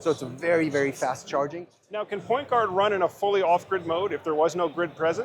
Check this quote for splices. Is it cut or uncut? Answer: cut